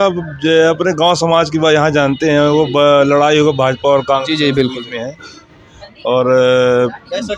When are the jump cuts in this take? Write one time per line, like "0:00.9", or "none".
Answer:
none